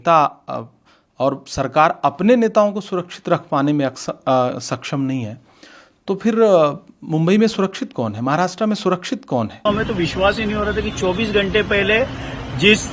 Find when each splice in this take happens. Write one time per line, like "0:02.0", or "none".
0:09.7